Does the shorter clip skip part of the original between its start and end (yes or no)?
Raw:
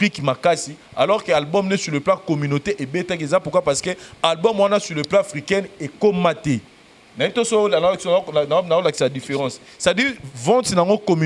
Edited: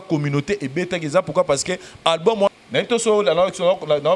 yes